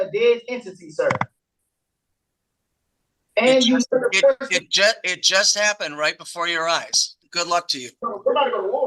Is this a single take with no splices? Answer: no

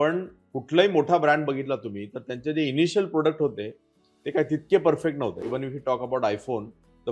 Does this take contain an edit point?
yes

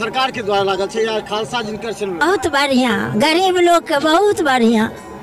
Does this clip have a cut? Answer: yes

